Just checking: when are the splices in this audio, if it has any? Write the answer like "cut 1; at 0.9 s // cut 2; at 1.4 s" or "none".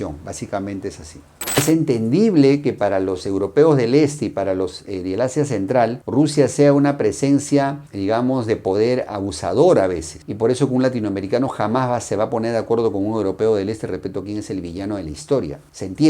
cut 1; at 1.6 s